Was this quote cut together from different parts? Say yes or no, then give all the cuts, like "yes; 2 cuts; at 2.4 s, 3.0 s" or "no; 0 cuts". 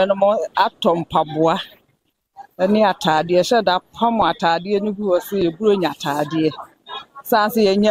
no; 0 cuts